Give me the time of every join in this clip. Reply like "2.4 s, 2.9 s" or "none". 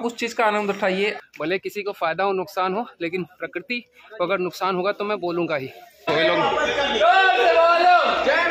1.1 s, 6.0 s